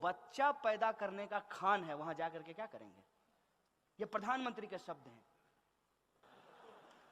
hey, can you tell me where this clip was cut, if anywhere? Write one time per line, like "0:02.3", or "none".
none